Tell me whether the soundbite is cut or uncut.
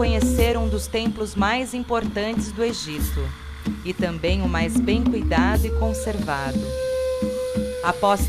cut